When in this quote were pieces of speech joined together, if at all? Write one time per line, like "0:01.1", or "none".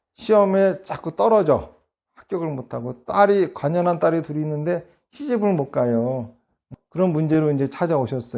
0:06.8